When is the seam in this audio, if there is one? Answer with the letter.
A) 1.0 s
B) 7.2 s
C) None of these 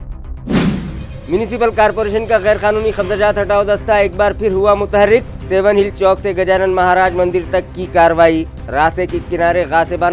C